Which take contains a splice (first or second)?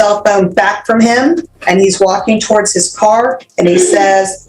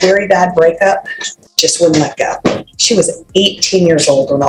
first